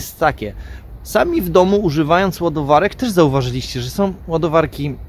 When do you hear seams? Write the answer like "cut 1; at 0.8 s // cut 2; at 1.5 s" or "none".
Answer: none